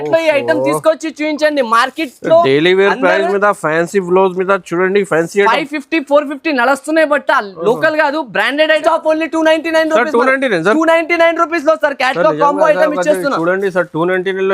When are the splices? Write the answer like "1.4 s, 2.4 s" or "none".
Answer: 8.8 s